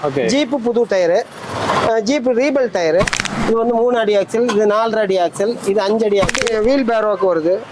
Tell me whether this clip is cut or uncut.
cut